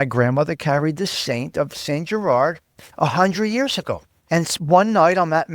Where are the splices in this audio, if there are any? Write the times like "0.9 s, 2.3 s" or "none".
4.1 s